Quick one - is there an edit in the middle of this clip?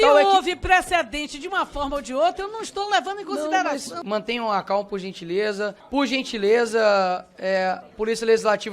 yes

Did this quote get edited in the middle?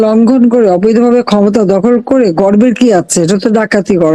no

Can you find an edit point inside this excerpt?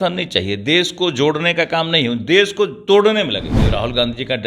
yes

